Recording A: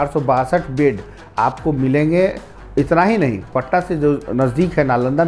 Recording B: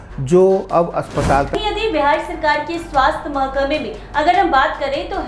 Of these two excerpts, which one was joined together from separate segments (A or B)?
B